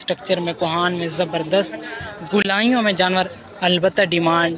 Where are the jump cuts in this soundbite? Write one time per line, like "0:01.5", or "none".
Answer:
none